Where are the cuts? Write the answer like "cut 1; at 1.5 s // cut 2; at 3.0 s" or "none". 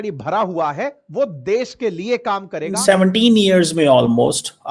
cut 1; at 2.8 s

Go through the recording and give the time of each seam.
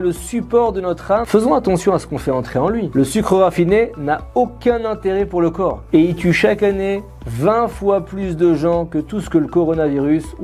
cut 1; at 1.2 s // cut 2; at 2.9 s // cut 3; at 5.8 s

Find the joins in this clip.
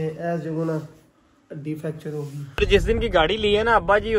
cut 1; at 2.6 s

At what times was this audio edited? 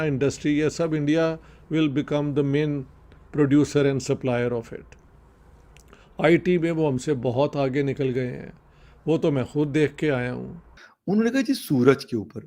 cut 1; at 10.8 s

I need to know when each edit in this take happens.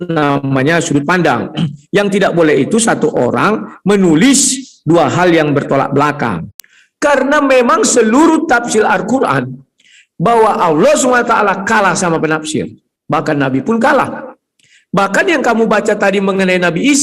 cut 1; at 6.5 s

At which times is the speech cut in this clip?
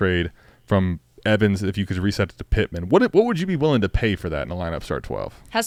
none

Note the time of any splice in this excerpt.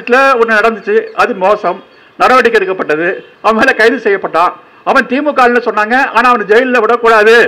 none

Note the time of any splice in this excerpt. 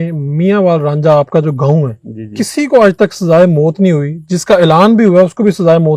none

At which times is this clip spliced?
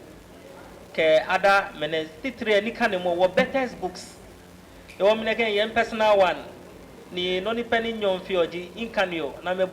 none

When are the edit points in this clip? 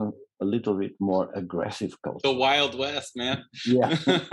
none

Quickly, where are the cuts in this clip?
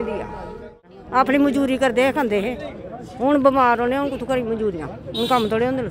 cut 1; at 0.9 s

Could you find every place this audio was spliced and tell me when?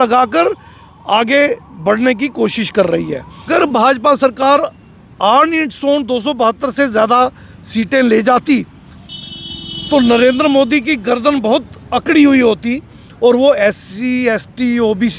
cut 1; at 3.5 s

